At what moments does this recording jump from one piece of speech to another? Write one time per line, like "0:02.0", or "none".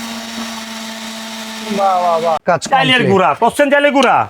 0:02.4